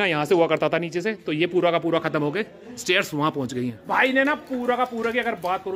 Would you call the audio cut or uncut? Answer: cut